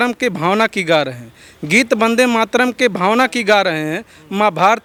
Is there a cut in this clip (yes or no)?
no